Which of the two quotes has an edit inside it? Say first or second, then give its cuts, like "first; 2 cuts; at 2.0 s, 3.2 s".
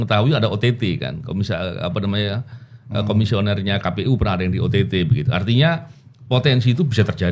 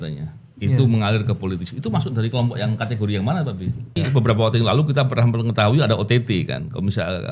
second; 1 cut; at 4.0 s